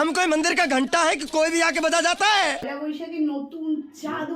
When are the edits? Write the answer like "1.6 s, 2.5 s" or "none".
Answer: 2.7 s